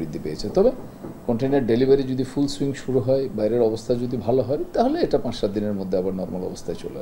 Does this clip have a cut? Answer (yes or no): no